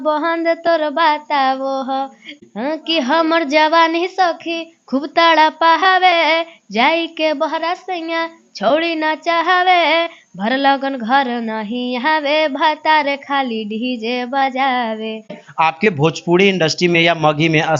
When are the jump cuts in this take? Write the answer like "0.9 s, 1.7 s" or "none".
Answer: 2.3 s, 15.4 s